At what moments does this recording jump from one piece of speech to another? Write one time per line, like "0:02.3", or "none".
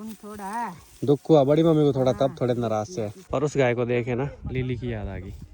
0:03.2